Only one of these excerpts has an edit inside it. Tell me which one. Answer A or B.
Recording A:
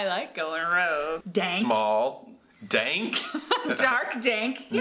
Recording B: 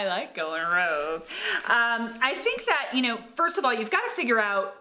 A